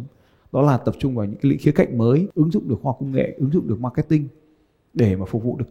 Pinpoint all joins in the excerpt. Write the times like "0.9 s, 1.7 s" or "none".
2.3 s